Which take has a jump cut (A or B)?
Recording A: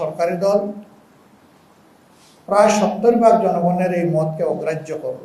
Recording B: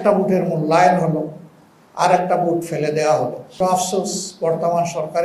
B